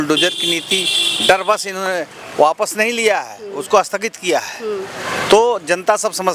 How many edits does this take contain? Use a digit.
0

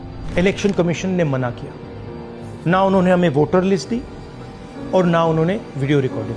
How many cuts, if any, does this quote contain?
0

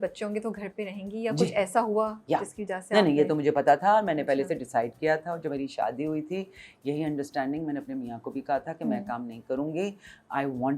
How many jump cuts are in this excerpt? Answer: 0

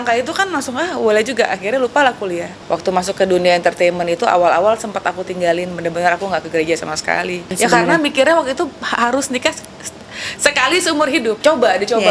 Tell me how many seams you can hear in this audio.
3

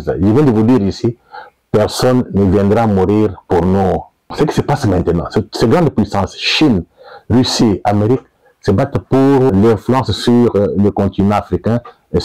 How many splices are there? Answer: 2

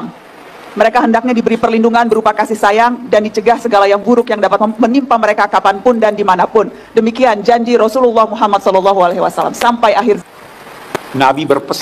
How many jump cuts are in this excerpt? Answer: 1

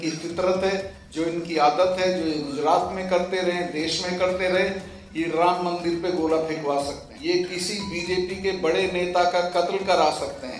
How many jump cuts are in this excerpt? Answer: 2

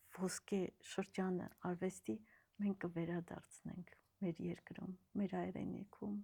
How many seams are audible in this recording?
0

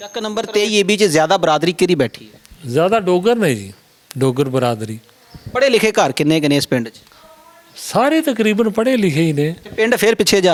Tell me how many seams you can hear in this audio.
0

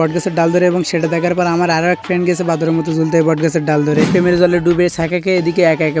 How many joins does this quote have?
1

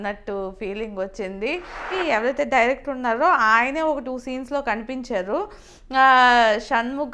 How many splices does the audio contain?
1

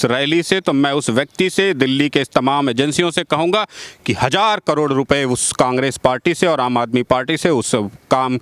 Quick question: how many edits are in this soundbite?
0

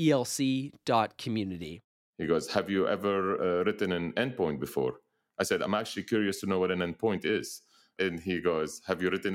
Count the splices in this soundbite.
1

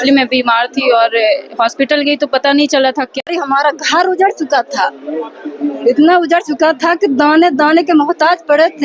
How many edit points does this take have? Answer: 1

